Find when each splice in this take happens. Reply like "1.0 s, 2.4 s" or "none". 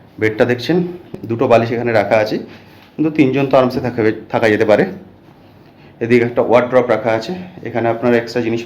1.1 s